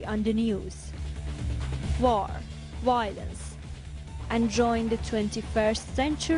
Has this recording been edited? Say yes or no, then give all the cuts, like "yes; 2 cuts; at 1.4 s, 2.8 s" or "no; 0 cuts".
no; 0 cuts